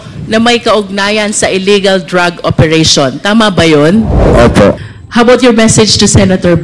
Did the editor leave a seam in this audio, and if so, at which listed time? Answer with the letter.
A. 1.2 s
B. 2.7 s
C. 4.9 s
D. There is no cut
C